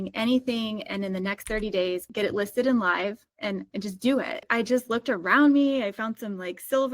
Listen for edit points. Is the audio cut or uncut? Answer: cut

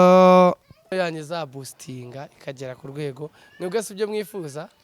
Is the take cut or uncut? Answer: cut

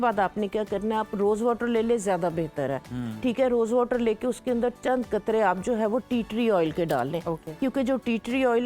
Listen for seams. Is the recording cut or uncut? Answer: uncut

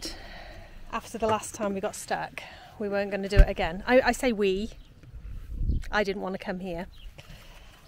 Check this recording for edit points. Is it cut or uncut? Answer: uncut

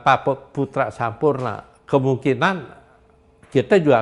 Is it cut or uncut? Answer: uncut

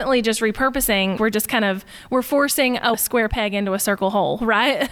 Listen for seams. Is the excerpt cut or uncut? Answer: cut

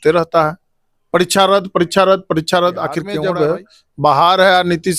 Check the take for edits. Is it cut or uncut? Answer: cut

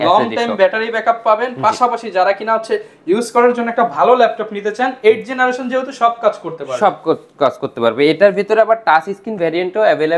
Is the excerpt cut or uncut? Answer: uncut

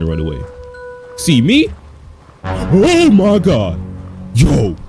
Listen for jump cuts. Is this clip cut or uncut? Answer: uncut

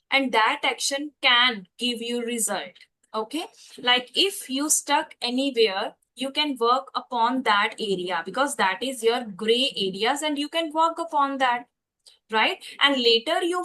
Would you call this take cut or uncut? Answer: uncut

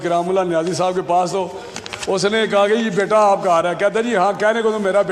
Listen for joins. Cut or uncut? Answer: uncut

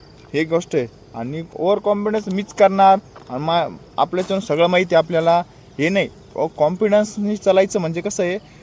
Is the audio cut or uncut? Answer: uncut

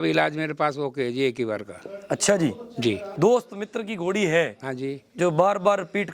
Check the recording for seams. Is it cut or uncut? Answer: cut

